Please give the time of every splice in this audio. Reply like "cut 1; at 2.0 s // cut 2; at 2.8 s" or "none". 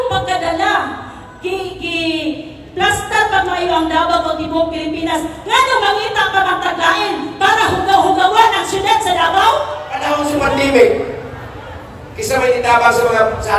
cut 1; at 10.0 s